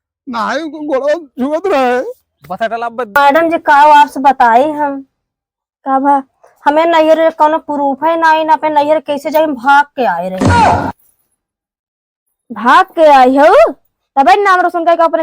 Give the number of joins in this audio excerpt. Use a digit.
1